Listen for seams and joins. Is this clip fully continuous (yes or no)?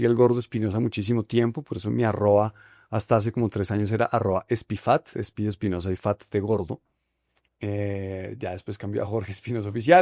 yes